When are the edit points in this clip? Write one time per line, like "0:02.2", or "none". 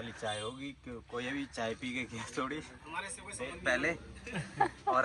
none